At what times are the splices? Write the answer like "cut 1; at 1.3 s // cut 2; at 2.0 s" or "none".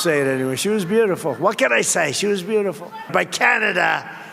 cut 1; at 3.1 s

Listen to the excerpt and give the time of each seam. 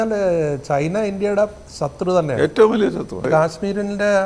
cut 1; at 3.3 s

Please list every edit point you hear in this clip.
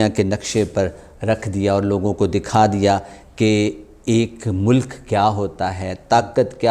none

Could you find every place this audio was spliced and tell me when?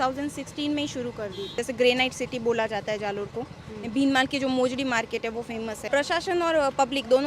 cut 1; at 1.6 s // cut 2; at 5.9 s

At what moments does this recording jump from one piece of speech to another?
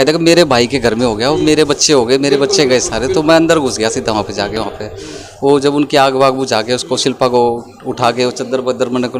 none

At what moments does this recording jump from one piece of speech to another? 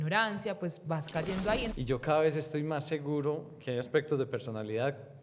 cut 1; at 1.7 s

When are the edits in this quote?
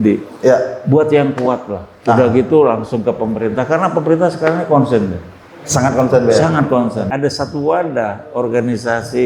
cut 1; at 7.1 s

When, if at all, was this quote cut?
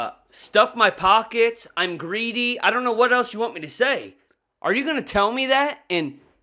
cut 1; at 4.2 s

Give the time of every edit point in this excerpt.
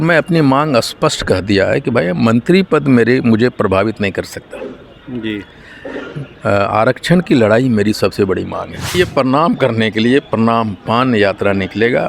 cut 1; at 8.9 s

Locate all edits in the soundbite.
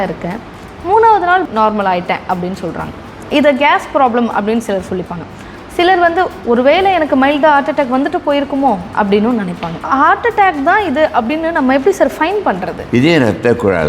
cut 1; at 9.9 s // cut 2; at 12.7 s

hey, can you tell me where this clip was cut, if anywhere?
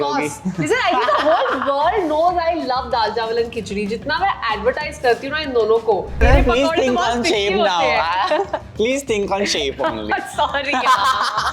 cut 1; at 6.2 s

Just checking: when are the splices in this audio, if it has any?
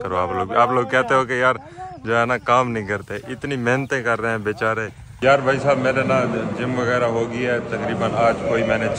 cut 1; at 5.1 s

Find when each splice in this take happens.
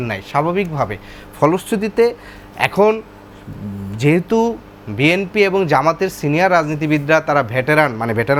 none

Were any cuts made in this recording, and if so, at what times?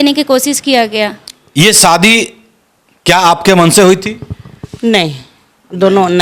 cut 1; at 1.4 s

